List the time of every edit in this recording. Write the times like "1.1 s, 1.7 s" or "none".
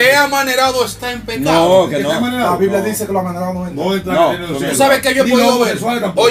none

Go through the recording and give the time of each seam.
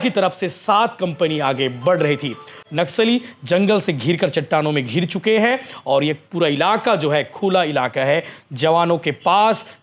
none

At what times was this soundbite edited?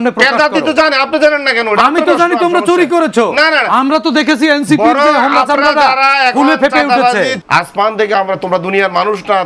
7.4 s

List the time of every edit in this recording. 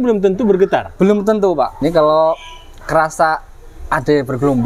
1.8 s

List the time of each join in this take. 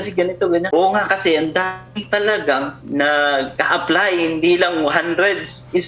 none

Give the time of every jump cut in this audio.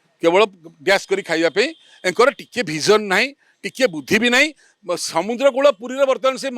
none

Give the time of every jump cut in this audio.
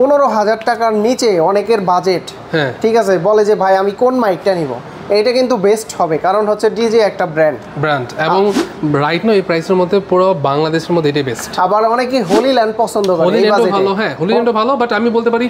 none

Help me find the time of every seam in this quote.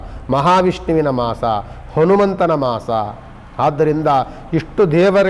none

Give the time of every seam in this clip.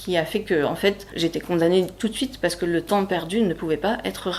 1.1 s

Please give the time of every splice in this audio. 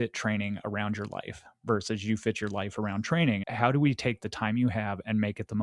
3.5 s

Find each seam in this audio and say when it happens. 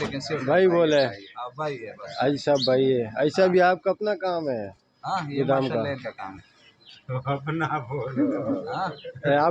none

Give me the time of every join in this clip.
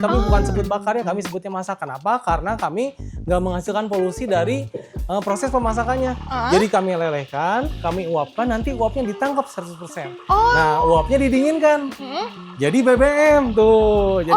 none

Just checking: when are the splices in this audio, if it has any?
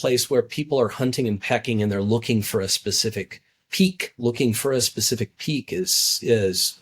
4.1 s

